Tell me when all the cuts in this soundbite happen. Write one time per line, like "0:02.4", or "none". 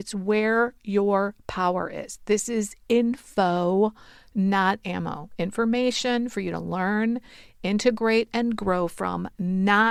none